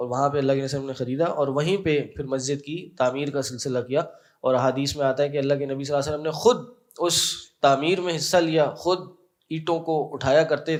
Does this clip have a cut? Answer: no; 0 cuts

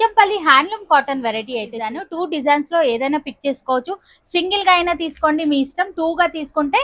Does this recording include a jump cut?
yes; 1 cut; at 2.0 s

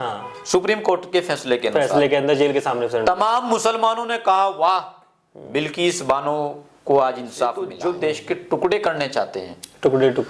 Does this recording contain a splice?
yes; 1 cut; at 7.7 s

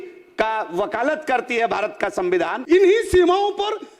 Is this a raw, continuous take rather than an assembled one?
no; 1 cut; at 2.6 s

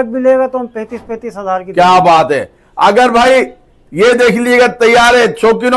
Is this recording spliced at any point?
no; 0 cuts

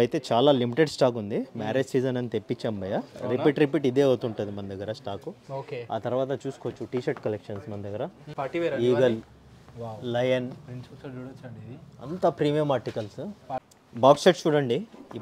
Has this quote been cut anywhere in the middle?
yes; 2 cuts; at 8.2 s, 13.7 s

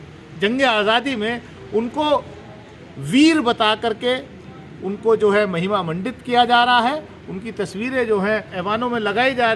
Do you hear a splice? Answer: yes; 1 cut; at 8.5 s

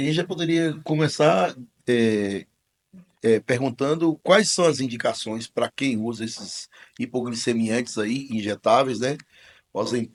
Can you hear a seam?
no; 0 cuts

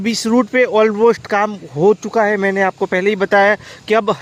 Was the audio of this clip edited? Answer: no; 0 cuts

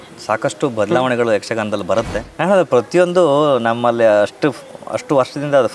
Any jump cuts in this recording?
yes; 1 cut; at 2.2 s

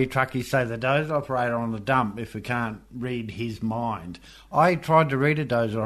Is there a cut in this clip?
no; 0 cuts

